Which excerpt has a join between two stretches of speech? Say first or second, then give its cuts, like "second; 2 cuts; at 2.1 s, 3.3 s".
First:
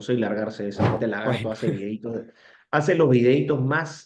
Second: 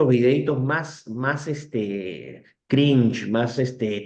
first; 1 cut; at 1.0 s